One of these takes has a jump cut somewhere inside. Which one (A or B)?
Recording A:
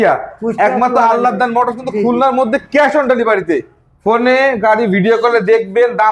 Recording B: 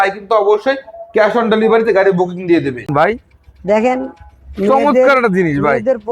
B